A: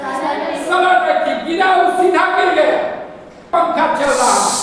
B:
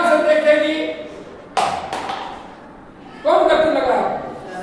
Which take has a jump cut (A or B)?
A